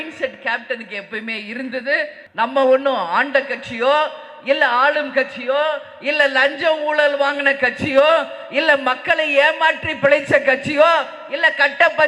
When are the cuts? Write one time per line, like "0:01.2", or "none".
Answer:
0:02.2